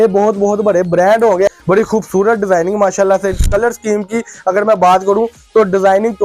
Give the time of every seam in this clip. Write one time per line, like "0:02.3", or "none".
0:01.5